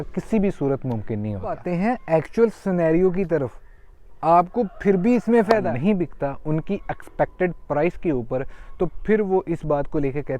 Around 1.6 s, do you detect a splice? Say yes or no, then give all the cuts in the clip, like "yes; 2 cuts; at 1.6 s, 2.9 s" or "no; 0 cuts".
yes; 2 cuts; at 1.6 s, 5.7 s